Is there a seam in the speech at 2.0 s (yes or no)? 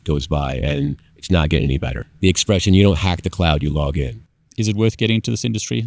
yes